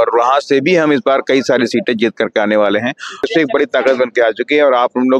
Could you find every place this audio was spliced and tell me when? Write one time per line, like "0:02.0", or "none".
0:03.3